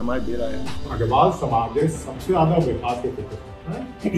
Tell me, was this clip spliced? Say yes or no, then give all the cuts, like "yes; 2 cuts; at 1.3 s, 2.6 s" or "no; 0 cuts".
yes; 1 cut; at 0.9 s